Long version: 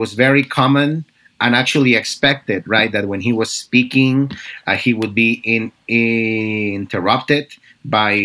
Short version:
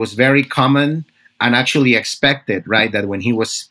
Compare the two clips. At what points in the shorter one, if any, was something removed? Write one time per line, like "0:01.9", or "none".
none